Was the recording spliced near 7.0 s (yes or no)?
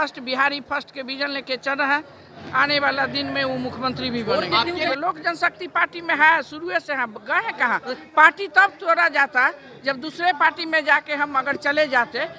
no